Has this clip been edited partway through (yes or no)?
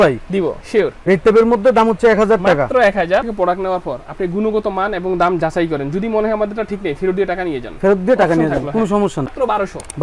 yes